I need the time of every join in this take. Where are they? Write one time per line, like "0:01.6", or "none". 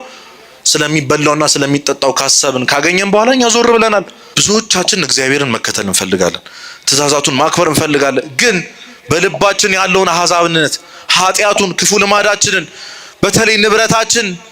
0:04.2